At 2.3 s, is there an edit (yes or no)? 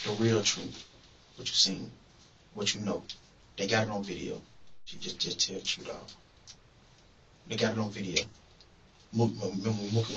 no